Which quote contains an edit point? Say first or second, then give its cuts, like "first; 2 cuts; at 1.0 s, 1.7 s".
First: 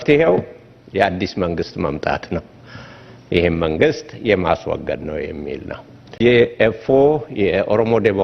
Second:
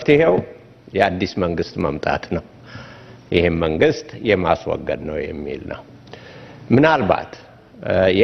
first; 1 cut; at 6.1 s